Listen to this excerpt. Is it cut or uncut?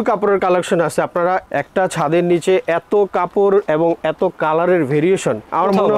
uncut